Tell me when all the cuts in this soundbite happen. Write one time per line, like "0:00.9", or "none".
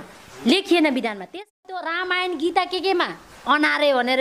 0:01.7